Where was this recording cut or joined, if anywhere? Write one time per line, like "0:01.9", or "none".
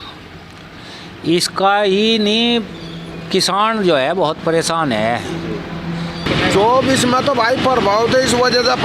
0:06.3